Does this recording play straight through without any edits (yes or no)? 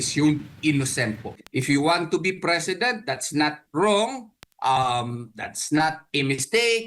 no